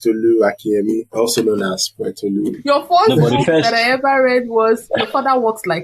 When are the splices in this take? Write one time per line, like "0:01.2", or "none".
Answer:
0:01.1
0:02.6